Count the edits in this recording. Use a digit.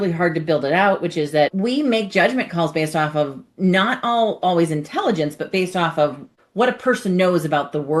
2